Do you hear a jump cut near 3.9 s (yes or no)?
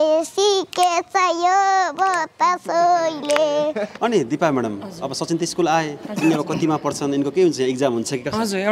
yes